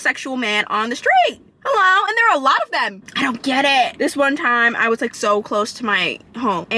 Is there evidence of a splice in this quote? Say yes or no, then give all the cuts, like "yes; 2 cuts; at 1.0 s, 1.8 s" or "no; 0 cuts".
no; 0 cuts